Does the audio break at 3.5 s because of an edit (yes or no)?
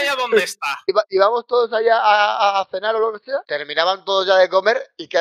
yes